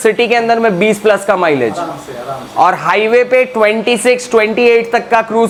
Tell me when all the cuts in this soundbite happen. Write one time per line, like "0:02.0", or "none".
none